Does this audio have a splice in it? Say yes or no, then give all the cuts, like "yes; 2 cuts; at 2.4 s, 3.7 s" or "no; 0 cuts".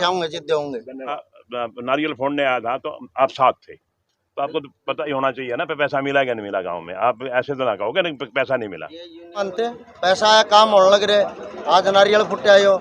yes; 2 cuts; at 1.3 s, 9.4 s